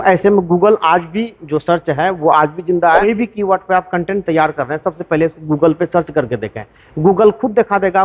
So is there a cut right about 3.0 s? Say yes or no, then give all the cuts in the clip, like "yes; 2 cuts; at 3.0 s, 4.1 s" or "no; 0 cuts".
yes; 1 cut; at 3.0 s